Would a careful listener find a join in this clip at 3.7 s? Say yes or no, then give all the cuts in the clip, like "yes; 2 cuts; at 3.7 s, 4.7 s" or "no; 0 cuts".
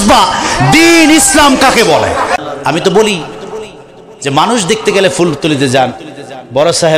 no; 1 cut; at 2.4 s